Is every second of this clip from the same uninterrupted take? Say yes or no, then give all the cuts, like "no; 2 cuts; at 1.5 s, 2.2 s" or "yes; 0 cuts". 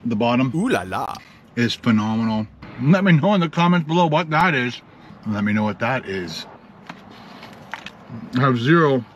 no; 3 cuts; at 1.2 s, 2.6 s, 6.6 s